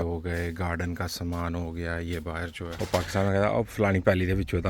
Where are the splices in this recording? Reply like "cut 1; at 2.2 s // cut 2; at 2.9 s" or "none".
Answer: cut 1; at 2.7 s